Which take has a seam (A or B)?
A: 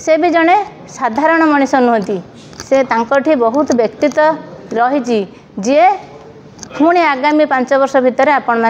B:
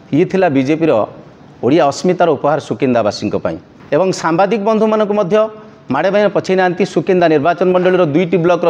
B